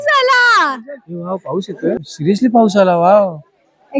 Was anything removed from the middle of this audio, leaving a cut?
yes; 1 cut; at 2.0 s

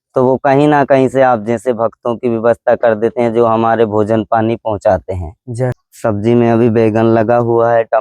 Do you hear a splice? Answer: yes; 1 cut; at 5.9 s

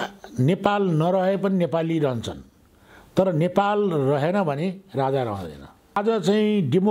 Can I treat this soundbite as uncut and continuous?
no; 1 cut; at 6.0 s

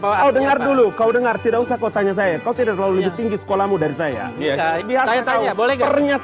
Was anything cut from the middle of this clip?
yes; 1 cut; at 4.8 s

